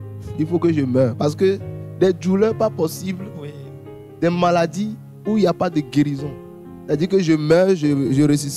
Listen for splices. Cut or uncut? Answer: uncut